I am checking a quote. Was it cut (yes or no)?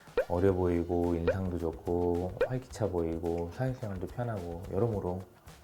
no